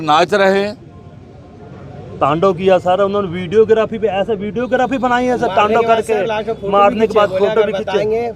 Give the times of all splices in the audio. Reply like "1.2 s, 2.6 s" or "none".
none